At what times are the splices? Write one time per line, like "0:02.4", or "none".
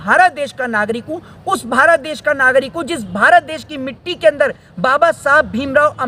none